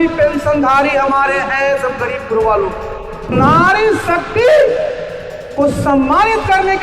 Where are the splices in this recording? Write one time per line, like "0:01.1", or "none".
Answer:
0:03.3